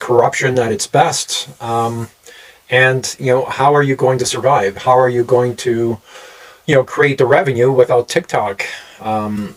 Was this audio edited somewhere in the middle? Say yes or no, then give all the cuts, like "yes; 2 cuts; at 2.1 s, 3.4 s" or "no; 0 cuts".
no; 0 cuts